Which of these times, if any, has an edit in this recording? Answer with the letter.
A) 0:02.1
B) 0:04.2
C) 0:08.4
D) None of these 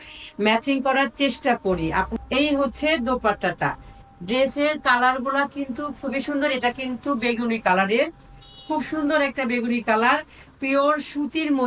A